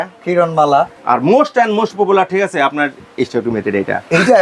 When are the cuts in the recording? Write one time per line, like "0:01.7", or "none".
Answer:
0:01.0
0:03.0